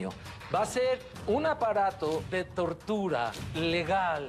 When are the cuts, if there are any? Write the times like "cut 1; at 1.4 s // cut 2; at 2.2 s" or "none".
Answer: cut 1; at 1.1 s // cut 2; at 2.3 s // cut 3; at 3.4 s